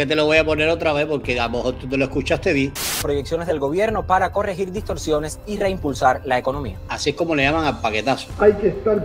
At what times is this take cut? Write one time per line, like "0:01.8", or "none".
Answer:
0:02.9
0:08.2